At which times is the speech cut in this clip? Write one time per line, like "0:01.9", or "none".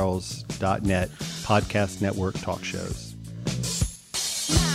0:03.0